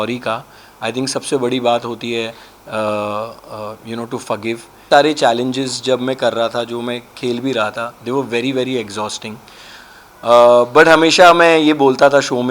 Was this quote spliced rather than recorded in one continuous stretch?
yes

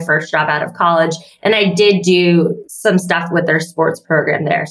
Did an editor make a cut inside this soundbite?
yes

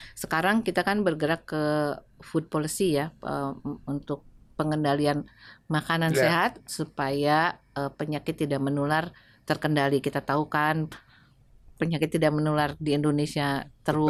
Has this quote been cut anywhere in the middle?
no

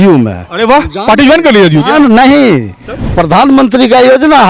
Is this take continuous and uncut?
no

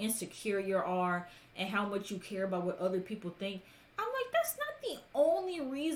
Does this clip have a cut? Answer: no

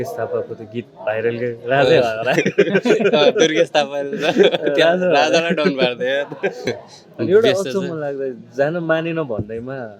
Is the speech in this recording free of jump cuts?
no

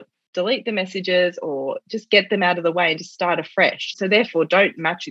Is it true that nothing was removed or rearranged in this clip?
no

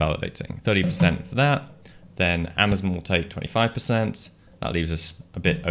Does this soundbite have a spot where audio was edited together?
no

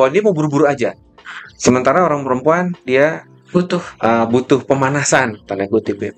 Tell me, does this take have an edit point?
no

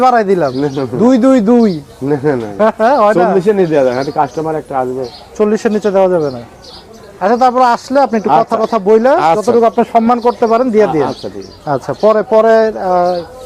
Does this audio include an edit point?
no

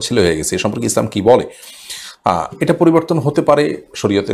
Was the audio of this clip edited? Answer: no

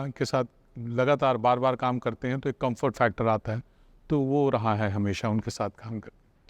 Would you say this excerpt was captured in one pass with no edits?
yes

